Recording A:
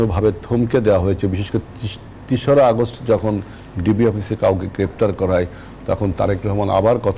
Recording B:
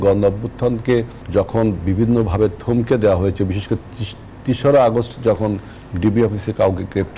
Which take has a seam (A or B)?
B